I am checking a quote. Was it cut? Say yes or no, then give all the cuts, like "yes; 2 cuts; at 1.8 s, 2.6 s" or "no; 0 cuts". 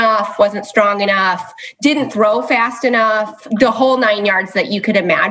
yes; 1 cut; at 3.4 s